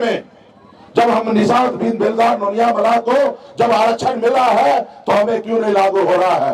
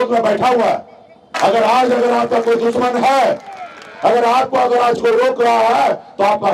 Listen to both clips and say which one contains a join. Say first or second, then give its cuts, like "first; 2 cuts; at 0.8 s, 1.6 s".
second; 1 cut; at 1.3 s